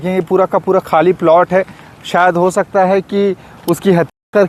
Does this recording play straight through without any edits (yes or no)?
yes